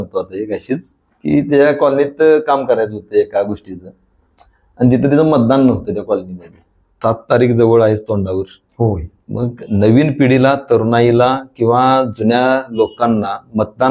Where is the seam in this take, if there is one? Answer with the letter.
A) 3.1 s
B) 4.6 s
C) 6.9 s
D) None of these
C